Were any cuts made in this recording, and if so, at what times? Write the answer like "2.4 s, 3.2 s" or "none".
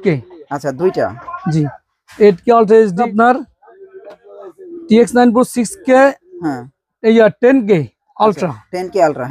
3.1 s

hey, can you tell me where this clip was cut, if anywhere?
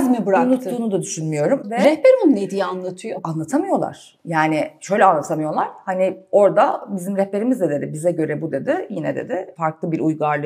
1.6 s, 3.2 s, 9.5 s

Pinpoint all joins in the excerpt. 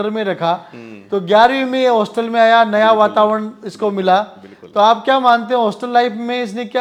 none

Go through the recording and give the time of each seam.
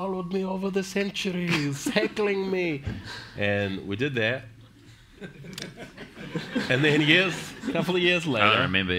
0.9 s

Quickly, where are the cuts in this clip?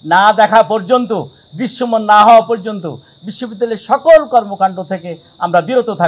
none

